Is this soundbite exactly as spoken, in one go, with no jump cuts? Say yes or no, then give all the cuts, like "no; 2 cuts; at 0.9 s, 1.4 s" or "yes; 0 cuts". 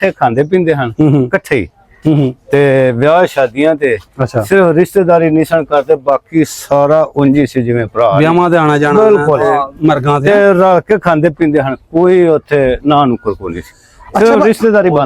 yes; 0 cuts